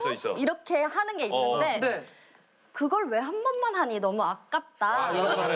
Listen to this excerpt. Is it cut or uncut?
uncut